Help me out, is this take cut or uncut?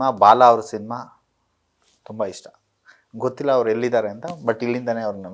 uncut